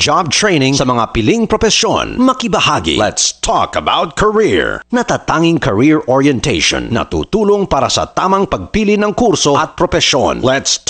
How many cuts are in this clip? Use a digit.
1